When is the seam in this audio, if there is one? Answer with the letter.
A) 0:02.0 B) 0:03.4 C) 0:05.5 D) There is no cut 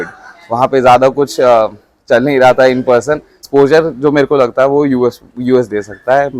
B